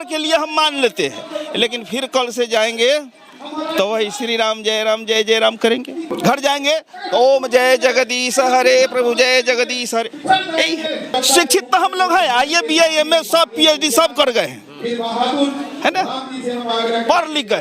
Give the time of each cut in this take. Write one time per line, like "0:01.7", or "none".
0:06.1
0:11.1